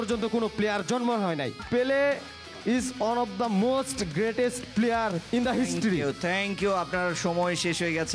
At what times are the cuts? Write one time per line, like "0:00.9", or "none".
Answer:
none

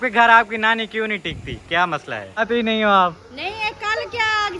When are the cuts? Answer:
0:02.5

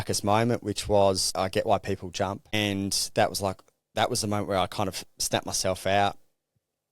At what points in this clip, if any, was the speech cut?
0:01.3
0:02.5

